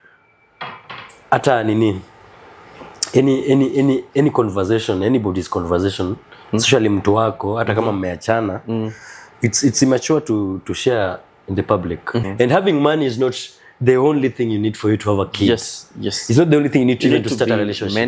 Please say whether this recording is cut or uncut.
cut